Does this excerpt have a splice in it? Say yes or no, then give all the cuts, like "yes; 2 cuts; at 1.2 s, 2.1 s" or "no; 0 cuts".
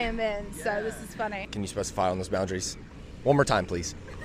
yes; 1 cut; at 1.4 s